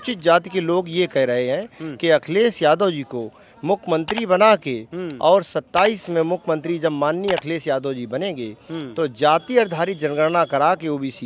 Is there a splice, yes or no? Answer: no